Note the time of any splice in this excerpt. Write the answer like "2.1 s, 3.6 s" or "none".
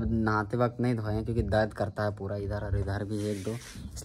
none